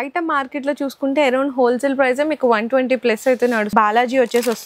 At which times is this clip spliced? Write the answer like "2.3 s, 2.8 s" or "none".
3.7 s